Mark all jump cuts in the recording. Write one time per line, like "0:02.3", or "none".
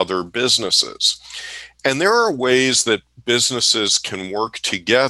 none